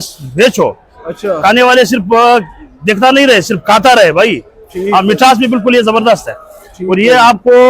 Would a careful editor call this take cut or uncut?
uncut